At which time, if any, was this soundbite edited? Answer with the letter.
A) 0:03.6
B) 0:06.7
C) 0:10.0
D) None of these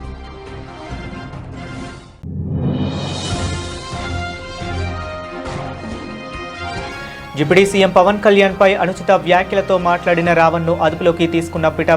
B